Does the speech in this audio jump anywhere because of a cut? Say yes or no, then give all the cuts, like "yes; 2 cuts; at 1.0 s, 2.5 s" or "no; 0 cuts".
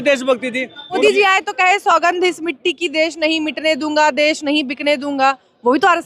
yes; 1 cut; at 1.0 s